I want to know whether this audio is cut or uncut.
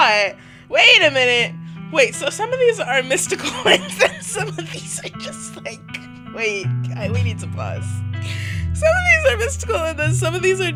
uncut